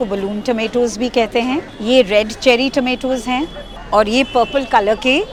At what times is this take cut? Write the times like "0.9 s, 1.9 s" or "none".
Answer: none

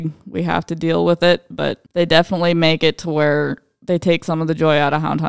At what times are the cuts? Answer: 1.8 s

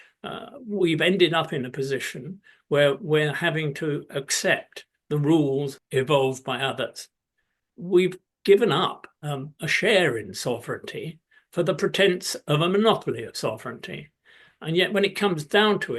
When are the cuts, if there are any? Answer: 5.8 s

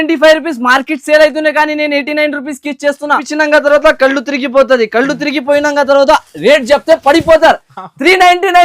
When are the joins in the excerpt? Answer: 3.3 s

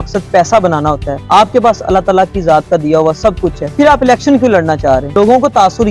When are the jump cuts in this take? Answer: 1.1 s, 3.6 s, 5.1 s

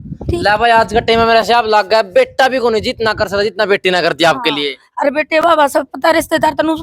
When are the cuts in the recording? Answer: none

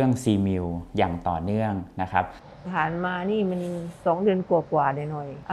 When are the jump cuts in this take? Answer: 2.4 s

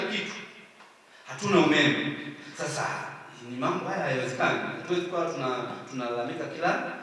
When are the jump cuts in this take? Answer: none

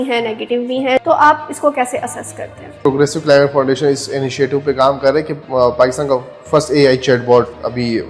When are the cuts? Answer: 1.0 s, 2.8 s

